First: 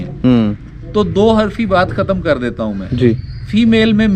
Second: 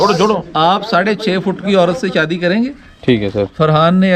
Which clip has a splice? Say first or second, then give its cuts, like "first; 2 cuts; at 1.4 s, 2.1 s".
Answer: second; 1 cut; at 2.9 s